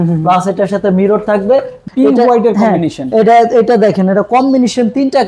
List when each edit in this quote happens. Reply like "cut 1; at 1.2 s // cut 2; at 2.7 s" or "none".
cut 1; at 1.8 s